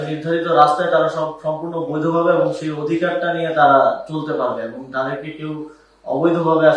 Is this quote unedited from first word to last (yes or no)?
yes